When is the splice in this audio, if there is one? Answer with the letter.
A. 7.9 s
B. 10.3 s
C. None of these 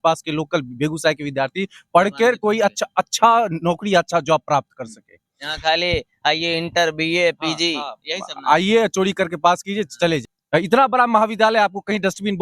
B